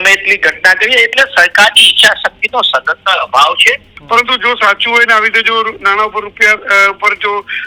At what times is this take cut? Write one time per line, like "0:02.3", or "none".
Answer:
0:03.9